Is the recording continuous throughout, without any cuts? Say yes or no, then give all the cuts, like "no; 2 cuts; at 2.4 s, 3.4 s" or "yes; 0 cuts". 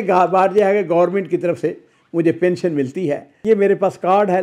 no; 1 cut; at 3.3 s